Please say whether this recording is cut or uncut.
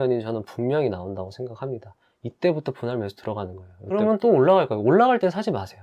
cut